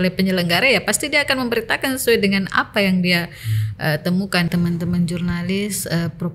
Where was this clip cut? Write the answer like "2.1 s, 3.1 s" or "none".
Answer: 4.5 s